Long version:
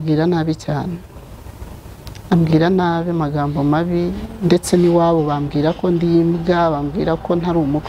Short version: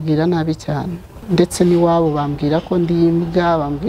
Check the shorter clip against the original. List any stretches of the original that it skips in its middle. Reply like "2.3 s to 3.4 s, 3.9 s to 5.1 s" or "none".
1.1 s to 4.2 s